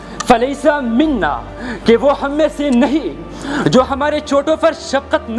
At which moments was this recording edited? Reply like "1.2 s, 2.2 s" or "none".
none